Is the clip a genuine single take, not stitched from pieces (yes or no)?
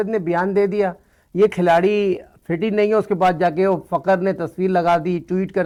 yes